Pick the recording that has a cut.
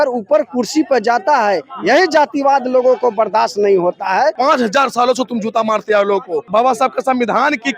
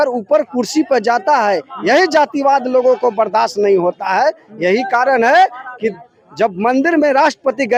first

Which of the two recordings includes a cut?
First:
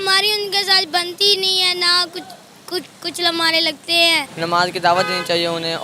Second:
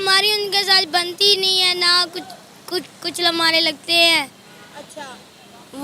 first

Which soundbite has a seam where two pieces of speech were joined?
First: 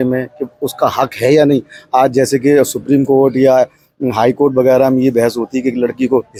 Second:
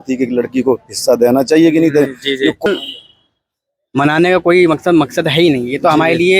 second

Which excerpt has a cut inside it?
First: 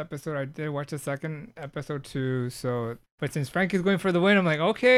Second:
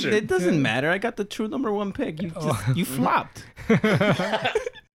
first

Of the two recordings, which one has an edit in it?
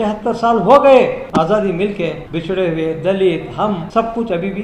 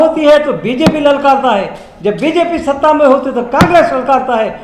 first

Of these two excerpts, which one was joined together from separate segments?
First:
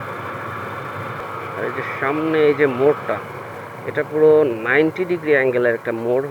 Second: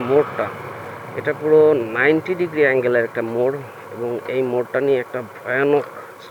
first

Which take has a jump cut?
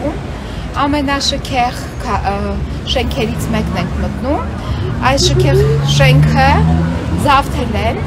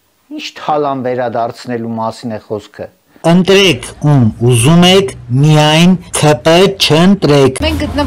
second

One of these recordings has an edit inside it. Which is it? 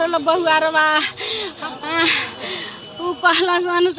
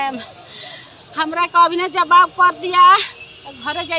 first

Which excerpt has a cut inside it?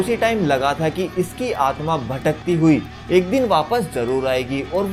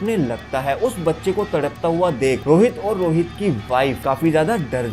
second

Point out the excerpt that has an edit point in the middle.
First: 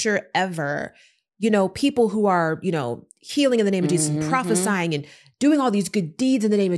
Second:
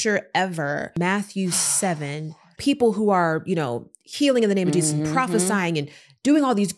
second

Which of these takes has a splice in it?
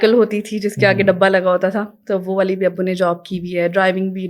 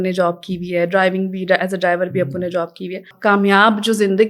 second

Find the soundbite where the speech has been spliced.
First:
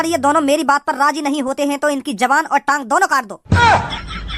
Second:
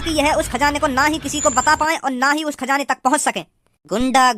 first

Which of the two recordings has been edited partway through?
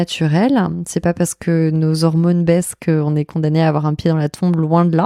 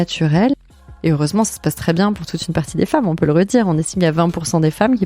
second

